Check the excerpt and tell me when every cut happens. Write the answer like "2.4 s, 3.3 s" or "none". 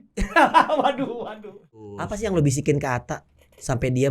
1.9 s